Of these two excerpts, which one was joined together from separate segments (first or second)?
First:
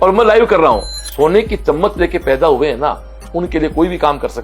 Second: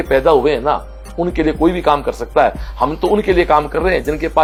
first